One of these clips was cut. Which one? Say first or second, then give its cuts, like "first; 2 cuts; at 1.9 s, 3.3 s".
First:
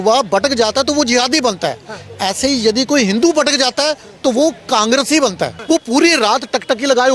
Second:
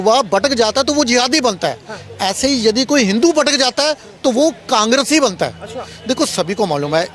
first; 1 cut; at 5.5 s